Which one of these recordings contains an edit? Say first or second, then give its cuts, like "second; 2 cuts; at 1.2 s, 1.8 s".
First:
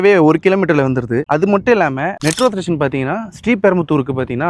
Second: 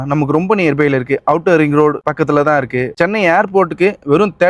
second; 1 cut; at 2.9 s